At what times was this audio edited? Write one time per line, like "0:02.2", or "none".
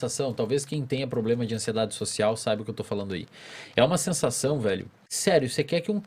0:05.1